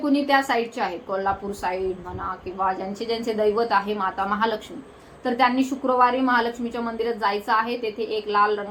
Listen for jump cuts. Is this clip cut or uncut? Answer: uncut